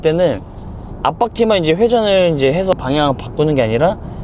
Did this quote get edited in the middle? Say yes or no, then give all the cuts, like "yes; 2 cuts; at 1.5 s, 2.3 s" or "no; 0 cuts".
yes; 1 cut; at 2.7 s